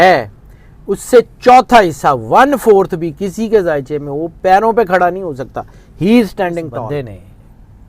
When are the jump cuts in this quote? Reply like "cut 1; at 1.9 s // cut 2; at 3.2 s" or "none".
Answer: cut 1; at 6.8 s